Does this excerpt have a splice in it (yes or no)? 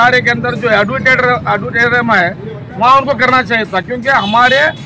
no